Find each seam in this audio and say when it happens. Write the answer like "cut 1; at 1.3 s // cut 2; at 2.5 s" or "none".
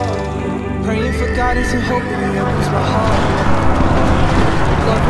none